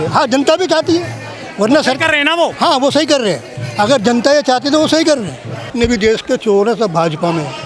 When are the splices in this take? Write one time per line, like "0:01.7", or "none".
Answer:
0:05.6